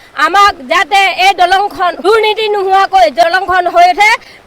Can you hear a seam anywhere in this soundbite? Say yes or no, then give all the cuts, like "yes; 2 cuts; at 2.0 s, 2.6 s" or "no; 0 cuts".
yes; 2 cuts; at 2.0 s, 3.2 s